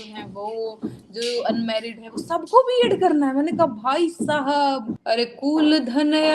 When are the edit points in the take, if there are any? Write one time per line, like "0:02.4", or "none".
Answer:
0:04.9